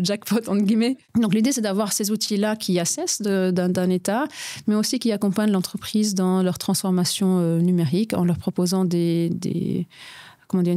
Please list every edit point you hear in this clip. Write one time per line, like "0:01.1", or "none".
0:01.0

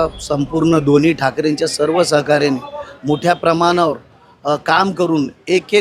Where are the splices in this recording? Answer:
none

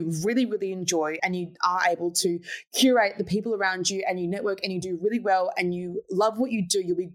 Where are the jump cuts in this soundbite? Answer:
0:01.2

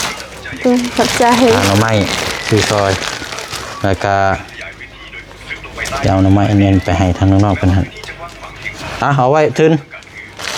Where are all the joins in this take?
none

